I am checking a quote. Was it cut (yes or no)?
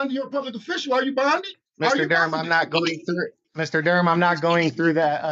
yes